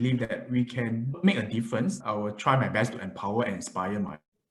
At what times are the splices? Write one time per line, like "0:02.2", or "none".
0:02.0